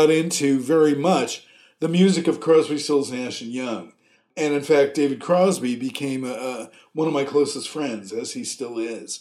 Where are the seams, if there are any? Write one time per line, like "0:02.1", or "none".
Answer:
0:04.3